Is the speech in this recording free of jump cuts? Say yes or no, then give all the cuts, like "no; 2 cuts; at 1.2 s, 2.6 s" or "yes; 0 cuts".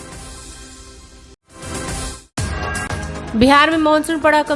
no; 1 cut; at 1.0 s